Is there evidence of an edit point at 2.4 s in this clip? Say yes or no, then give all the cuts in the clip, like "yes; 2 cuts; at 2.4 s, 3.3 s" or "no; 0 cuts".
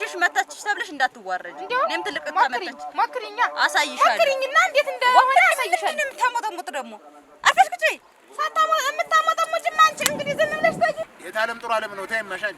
no; 1 cut; at 11.0 s